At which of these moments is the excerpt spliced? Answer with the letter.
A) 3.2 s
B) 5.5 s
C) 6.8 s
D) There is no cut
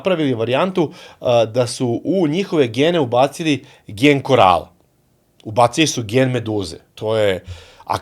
C